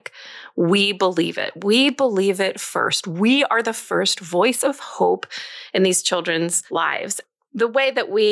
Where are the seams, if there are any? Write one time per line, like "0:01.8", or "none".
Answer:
0:06.9